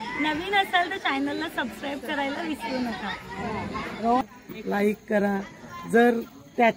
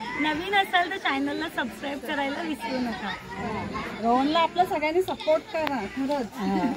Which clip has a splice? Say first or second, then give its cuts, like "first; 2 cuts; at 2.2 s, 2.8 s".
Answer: first; 1 cut; at 4.2 s